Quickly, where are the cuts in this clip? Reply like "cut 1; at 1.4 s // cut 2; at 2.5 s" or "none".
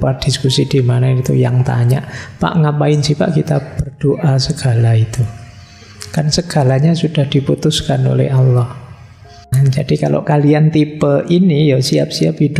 cut 1; at 9.5 s